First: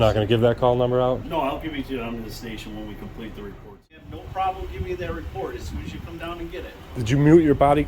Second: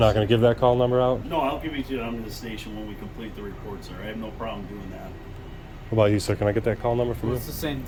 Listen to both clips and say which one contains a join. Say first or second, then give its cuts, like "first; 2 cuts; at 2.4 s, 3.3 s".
first; 1 cut; at 4.0 s